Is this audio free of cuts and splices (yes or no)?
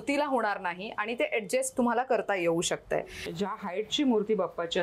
no